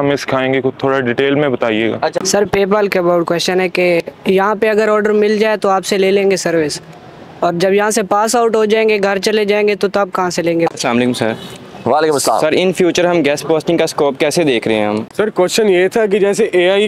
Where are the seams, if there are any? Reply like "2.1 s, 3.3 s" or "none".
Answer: 2.2 s, 10.7 s, 15.1 s